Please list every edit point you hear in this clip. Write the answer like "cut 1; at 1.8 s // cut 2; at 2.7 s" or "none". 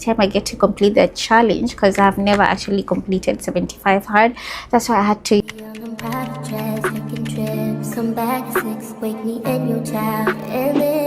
cut 1; at 5.4 s